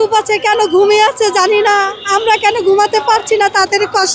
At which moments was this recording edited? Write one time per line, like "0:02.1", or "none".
none